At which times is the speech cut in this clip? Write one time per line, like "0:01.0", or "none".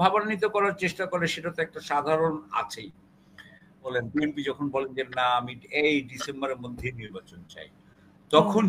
0:03.9